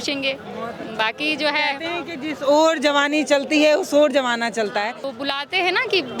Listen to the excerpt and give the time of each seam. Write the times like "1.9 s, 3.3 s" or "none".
5.0 s